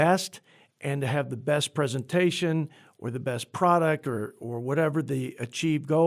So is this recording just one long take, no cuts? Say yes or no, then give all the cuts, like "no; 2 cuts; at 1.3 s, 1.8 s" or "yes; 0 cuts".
yes; 0 cuts